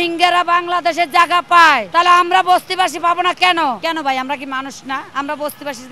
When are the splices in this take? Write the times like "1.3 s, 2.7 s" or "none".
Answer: 1.8 s, 3.8 s, 5.1 s